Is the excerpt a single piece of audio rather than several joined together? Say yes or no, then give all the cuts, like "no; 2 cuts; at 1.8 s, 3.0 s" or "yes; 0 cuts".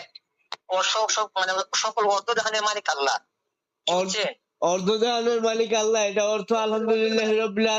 yes; 0 cuts